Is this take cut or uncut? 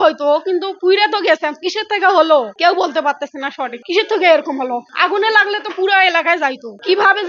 uncut